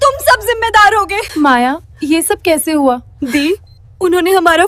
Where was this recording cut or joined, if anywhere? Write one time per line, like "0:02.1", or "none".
0:01.2
0:01.9
0:03.1